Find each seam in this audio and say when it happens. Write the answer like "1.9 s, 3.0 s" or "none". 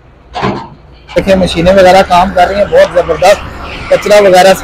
1.2 s